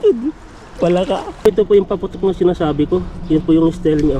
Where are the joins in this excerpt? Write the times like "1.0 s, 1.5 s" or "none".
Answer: 1.3 s